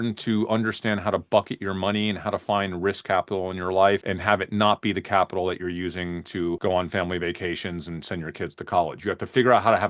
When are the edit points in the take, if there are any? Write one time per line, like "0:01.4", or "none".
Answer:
0:04.1
0:06.6